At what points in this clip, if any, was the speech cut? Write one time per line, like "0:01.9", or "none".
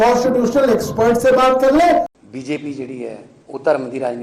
0:02.1
0:03.3